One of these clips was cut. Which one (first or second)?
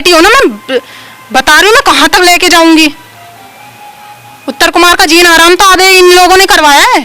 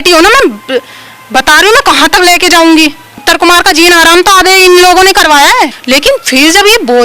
second